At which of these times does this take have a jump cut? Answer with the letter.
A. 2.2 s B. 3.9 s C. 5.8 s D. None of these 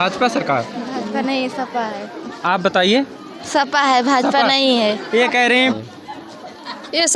C